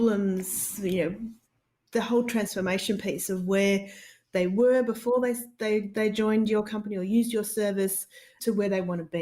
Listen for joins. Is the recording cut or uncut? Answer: cut